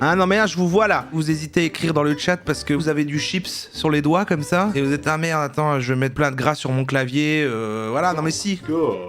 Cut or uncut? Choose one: cut